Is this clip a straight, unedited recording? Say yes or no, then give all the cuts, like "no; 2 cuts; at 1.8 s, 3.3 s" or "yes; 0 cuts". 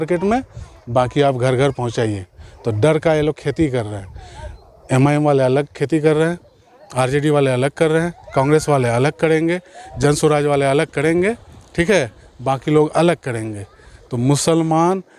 yes; 0 cuts